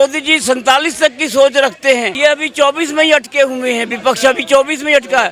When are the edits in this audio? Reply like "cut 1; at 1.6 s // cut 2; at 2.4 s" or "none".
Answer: cut 1; at 2.1 s